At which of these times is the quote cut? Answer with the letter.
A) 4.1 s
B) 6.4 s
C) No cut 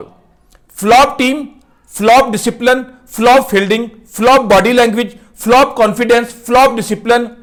C